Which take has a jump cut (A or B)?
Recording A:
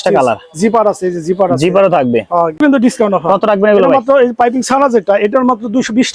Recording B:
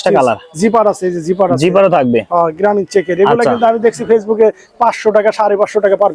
A